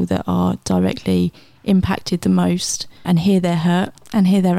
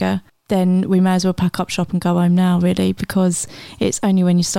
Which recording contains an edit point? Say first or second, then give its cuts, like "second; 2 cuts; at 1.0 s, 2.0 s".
first; 1 cut; at 3.0 s